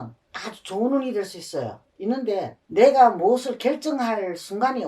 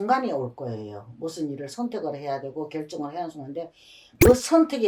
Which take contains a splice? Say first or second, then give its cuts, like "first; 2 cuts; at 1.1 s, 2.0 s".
first; 1 cut; at 2.6 s